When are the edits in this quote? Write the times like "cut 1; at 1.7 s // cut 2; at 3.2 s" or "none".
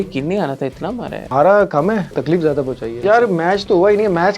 cut 1; at 1.2 s // cut 2; at 2.6 s

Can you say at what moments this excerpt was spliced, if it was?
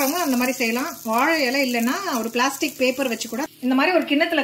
cut 1; at 3.5 s

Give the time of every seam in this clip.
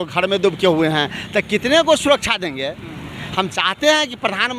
none

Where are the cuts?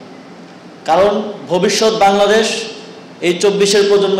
none

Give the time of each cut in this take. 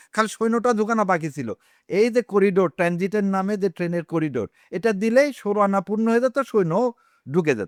none

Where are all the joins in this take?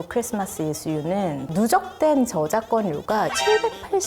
cut 1; at 1.4 s // cut 2; at 3.3 s

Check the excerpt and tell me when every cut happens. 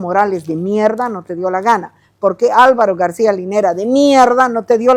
none

